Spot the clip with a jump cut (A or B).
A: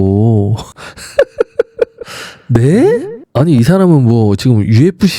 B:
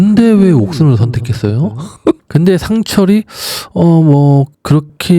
B